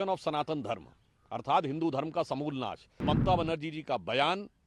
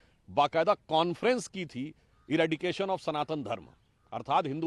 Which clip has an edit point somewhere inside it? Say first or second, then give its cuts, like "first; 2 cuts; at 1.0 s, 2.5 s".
first; 1 cut; at 2.8 s